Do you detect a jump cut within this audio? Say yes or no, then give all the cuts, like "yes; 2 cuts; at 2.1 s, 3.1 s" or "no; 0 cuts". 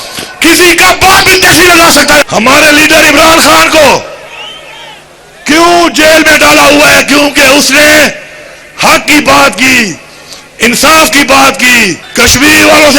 yes; 2 cuts; at 2.2 s, 12.0 s